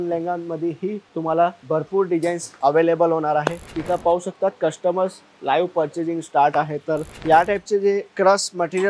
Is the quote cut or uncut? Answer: cut